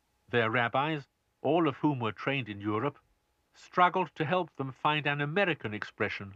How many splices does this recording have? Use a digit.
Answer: 1